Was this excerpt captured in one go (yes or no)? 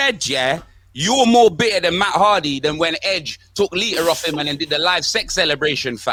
yes